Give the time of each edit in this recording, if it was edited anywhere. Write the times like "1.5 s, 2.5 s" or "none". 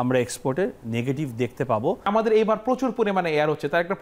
2.1 s